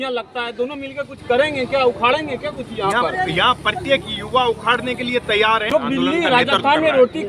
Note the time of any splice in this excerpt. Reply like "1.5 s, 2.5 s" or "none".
5.7 s

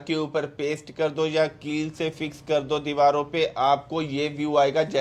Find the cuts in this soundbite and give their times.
none

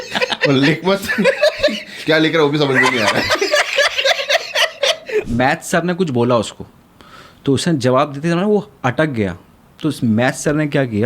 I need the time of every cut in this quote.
5.3 s

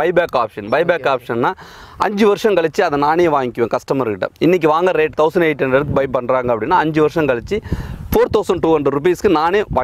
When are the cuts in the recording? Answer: none

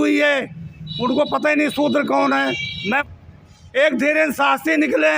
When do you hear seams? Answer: 3.0 s

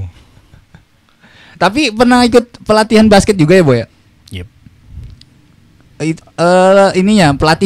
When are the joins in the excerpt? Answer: none

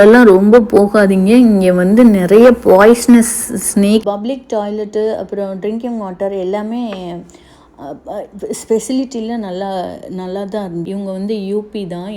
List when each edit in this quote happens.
4.0 s, 10.9 s

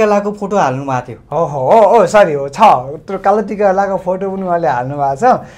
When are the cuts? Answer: none

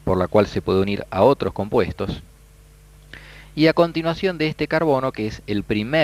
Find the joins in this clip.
none

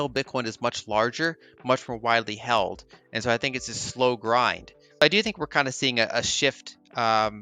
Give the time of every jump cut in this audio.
5.0 s

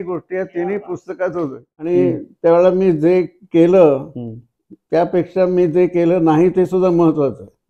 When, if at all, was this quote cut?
1.9 s

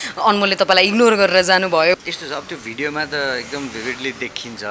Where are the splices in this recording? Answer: 2.0 s

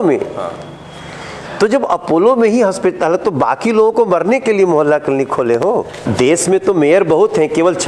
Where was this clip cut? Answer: 5.9 s

